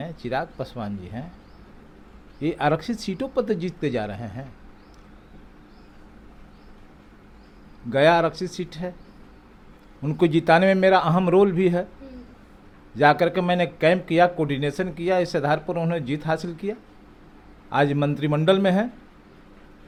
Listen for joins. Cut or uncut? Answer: uncut